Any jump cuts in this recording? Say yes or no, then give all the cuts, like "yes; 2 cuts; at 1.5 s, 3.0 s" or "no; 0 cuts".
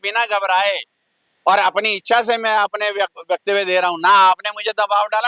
no; 0 cuts